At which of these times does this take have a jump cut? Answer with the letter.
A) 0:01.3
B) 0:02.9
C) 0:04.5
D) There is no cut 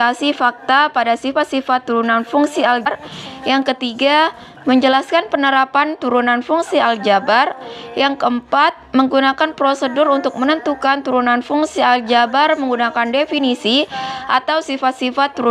B